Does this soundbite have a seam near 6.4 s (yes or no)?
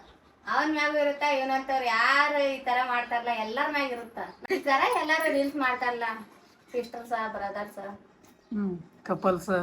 no